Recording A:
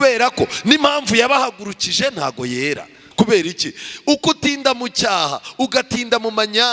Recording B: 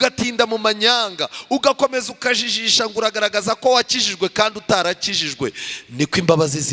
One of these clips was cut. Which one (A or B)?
A